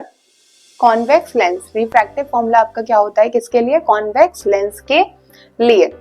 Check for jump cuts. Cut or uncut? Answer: uncut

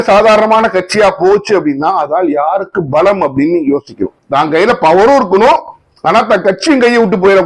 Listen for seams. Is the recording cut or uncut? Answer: cut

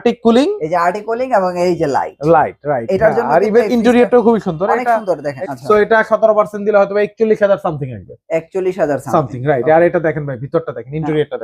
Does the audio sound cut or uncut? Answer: cut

